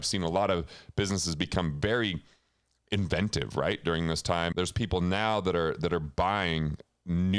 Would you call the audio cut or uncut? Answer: cut